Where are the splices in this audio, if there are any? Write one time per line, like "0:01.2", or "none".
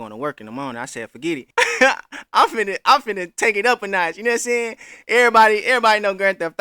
0:01.4

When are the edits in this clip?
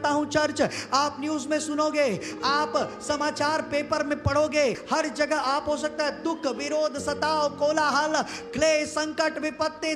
0:04.8

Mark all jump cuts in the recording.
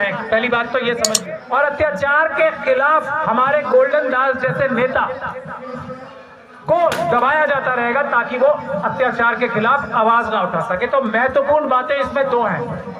0:01.3

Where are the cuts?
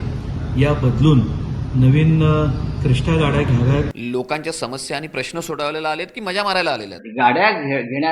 0:03.9
0:07.0

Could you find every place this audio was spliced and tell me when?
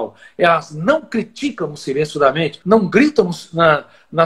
0:02.6

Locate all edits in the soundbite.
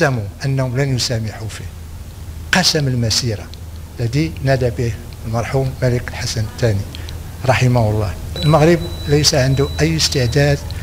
0:08.4

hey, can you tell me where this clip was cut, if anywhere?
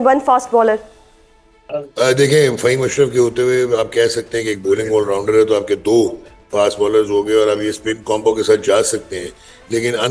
none

